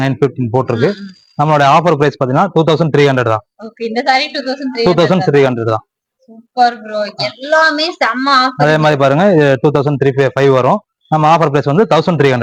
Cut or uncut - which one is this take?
uncut